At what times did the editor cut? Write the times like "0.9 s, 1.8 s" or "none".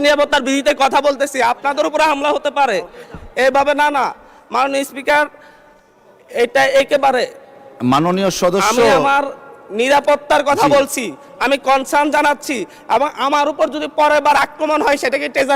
none

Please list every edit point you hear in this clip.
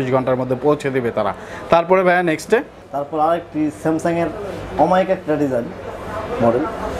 none

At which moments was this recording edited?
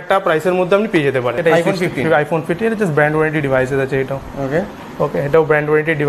1.4 s

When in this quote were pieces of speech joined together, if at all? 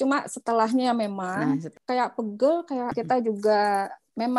1.7 s, 2.9 s

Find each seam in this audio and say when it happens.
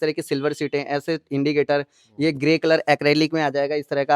none

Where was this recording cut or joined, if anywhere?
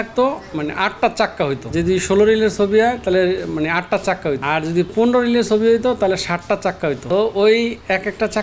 1.6 s, 4.4 s, 7.0 s

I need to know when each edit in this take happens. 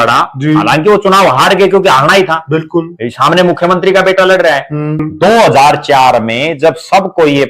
5.0 s

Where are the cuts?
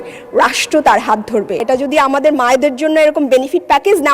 1.6 s

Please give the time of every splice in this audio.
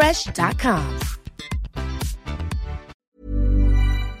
3.0 s

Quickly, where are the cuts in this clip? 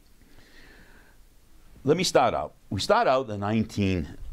1.7 s

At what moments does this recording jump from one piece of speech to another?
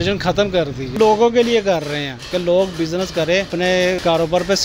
0.9 s, 3.7 s

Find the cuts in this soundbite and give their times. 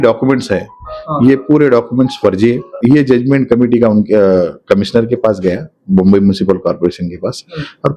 2.7 s

